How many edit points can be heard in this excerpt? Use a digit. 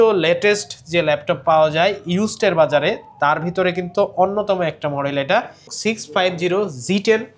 1